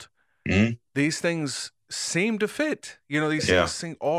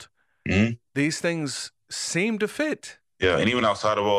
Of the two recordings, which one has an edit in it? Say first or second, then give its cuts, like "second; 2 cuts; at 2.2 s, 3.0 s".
second; 1 cut; at 2.9 s